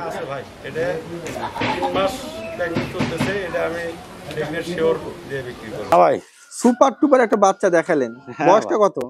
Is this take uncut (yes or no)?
no